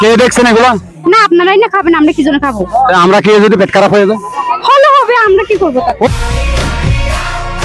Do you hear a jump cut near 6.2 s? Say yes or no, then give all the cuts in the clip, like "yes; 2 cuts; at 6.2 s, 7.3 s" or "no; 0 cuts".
yes; 1 cut; at 6.2 s